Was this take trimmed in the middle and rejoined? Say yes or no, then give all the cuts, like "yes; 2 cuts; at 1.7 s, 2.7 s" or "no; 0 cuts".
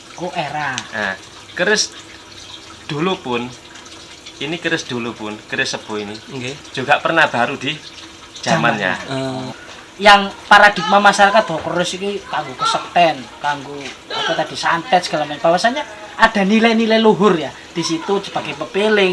yes; 1 cut; at 9.5 s